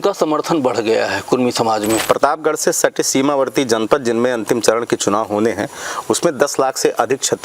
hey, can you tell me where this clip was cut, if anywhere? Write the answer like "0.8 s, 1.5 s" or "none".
2.0 s